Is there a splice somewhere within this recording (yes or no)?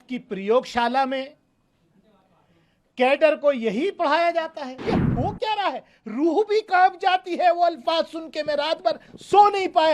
yes